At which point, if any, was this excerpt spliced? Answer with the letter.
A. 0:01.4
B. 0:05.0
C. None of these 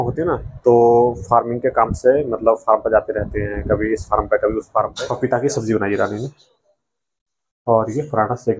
B